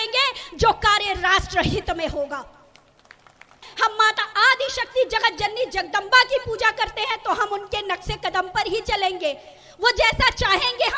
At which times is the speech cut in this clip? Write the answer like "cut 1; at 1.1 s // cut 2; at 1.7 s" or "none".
cut 1; at 3.7 s